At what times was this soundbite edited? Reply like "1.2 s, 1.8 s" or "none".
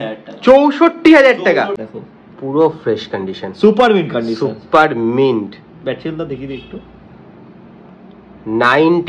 1.8 s